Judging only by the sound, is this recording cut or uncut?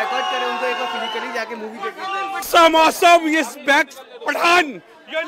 cut